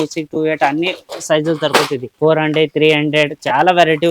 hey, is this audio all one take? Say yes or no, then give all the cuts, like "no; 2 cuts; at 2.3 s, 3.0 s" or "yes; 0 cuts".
no; 1 cut; at 2.1 s